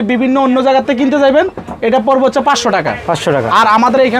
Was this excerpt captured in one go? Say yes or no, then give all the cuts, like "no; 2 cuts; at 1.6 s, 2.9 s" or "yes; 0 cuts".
yes; 0 cuts